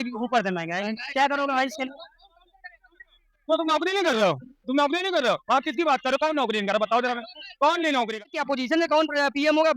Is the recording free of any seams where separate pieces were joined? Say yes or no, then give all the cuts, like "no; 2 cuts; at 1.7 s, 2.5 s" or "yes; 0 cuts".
no; 1 cut; at 8.1 s